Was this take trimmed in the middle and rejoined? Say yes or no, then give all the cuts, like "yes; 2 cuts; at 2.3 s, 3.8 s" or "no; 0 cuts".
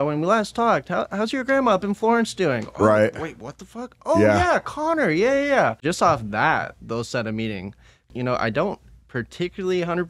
yes; 2 cuts; at 5.8 s, 8.1 s